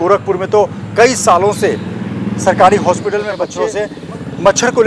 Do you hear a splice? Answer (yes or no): yes